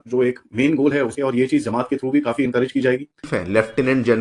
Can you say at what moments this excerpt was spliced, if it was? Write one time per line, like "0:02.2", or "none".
0:03.3